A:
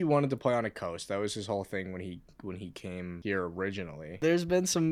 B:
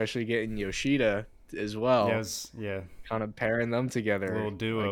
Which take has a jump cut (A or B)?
A